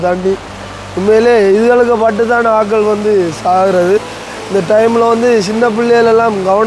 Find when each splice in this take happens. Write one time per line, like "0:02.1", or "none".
none

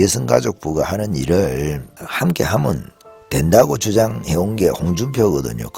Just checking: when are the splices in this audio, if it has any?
none

